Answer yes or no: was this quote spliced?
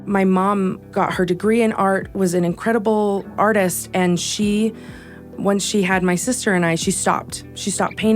yes